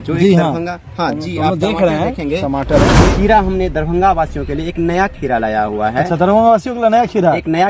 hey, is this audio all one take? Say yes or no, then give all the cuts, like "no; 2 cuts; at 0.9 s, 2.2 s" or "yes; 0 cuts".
no; 1 cut; at 3.1 s